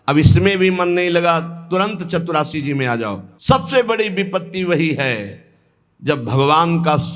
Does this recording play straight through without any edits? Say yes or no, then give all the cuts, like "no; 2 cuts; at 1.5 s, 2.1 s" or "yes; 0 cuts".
no; 1 cut; at 3.3 s